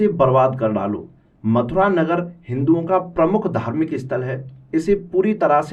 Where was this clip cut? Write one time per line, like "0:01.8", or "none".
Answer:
none

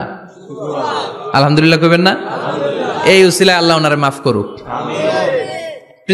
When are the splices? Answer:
none

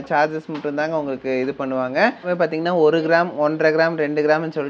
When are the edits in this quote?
0:02.3

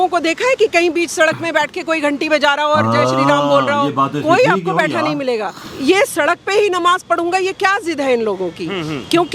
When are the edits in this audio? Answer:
0:05.7

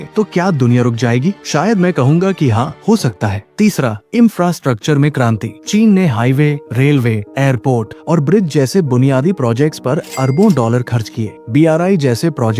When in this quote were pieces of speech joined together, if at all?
none

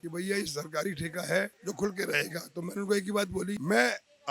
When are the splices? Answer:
none

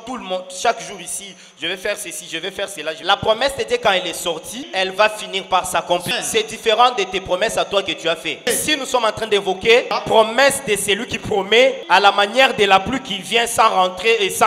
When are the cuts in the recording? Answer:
0:03.0
0:04.6
0:06.1
0:08.4
0:10.0
0:11.8

